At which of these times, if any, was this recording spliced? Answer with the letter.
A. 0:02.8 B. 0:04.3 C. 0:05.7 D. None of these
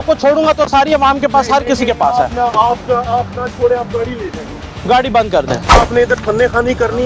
C